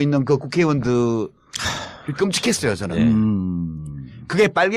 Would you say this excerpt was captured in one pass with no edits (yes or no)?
yes